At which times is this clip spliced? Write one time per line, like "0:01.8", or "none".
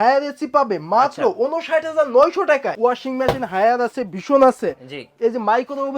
0:02.7